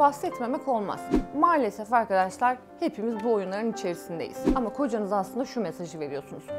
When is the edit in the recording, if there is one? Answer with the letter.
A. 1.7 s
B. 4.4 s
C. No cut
B